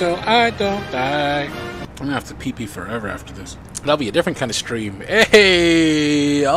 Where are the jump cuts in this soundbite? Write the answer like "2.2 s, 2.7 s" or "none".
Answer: 1.9 s, 3.6 s